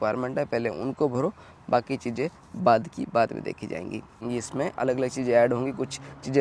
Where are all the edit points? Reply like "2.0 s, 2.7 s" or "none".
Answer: 4.2 s

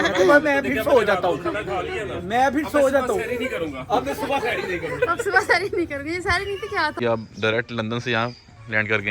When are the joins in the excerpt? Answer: 7.0 s

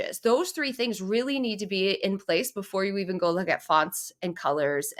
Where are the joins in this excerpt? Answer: none

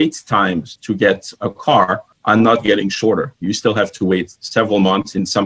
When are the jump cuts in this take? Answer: none

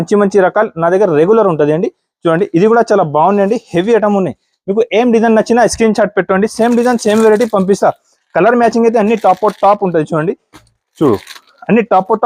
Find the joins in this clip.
none

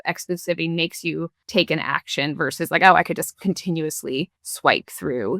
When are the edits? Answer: 1.4 s, 4.4 s

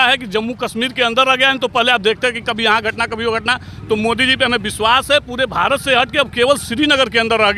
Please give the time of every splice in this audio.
none

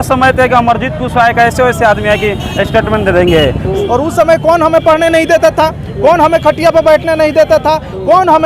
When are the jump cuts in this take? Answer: 3.7 s

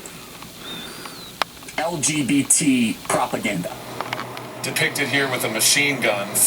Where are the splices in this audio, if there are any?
3.9 s

